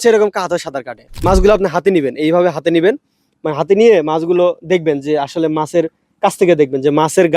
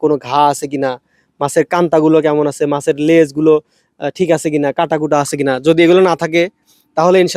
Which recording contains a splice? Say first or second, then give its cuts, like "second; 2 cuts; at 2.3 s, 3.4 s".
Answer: first; 1 cut; at 1.1 s